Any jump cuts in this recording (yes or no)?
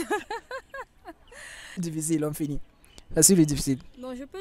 yes